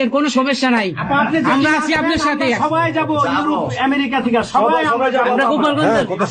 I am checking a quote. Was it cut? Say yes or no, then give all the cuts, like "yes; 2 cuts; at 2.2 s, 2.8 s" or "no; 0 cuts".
no; 0 cuts